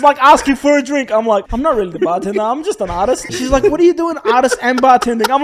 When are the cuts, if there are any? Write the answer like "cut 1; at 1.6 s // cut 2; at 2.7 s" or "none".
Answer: cut 1; at 1.5 s // cut 2; at 3.3 s